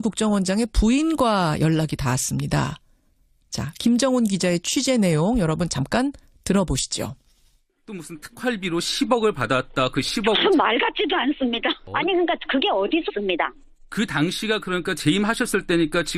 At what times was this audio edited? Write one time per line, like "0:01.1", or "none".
none

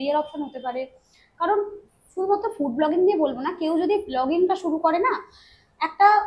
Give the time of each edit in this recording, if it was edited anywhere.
none

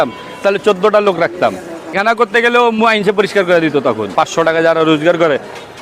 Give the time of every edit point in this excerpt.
0:01.9
0:04.1

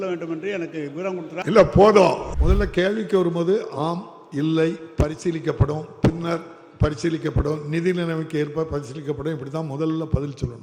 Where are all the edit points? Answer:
0:01.4
0:02.3

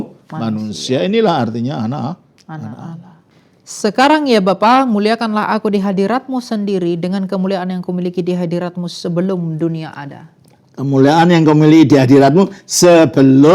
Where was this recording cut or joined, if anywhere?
0:03.2

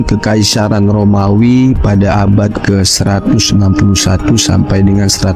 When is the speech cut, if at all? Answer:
none

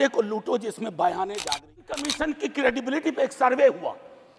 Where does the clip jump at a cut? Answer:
0:02.0

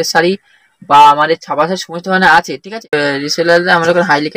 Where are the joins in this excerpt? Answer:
0:02.9

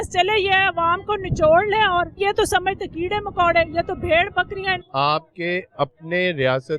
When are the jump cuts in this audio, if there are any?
0:02.1
0:04.8

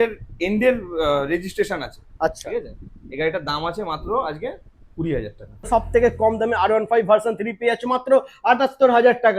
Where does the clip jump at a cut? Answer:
0:05.7

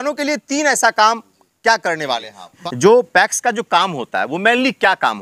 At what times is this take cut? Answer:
0:02.5

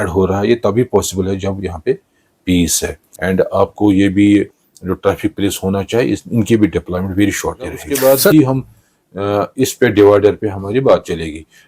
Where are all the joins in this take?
0:03.4
0:07.8

